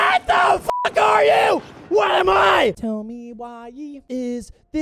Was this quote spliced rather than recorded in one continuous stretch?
yes; 1 cut; at 2.8 s

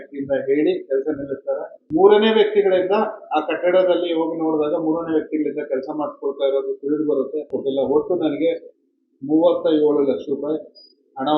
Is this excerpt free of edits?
no; 2 cuts; at 1.7 s, 7.5 s

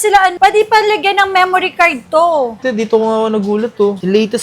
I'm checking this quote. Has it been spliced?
yes; 1 cut; at 2.6 s

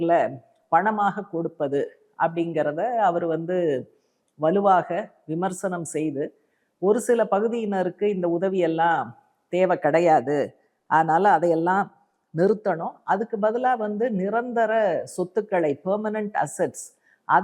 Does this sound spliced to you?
no; 0 cuts

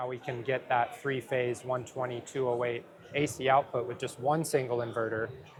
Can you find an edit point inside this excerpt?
no; 0 cuts

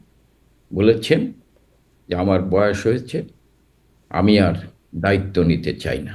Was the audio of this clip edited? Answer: no; 0 cuts

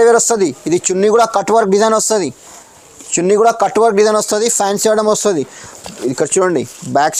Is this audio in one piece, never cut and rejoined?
yes; 0 cuts

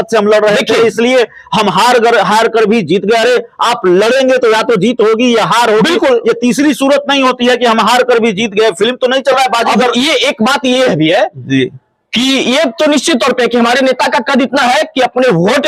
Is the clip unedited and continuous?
yes; 0 cuts

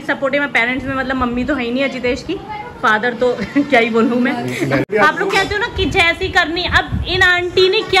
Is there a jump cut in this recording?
yes; 1 cut; at 4.9 s

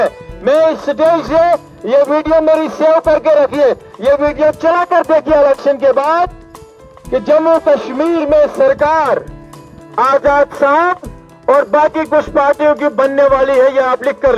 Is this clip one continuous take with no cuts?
yes; 0 cuts

